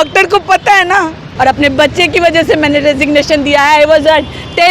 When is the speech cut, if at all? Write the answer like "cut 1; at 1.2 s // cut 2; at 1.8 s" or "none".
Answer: cut 1; at 1.2 s